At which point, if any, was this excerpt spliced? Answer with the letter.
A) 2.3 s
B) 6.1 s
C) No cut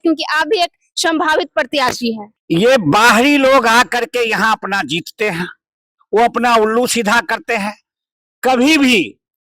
A